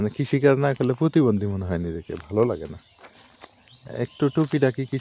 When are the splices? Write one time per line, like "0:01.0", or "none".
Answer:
none